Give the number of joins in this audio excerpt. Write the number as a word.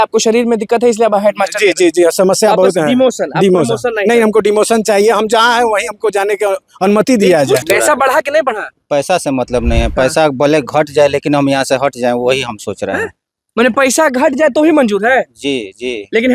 one